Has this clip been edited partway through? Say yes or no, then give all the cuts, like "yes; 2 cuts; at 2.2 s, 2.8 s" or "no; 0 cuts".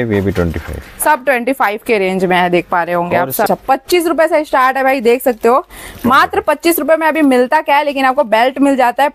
yes; 1 cut; at 3.5 s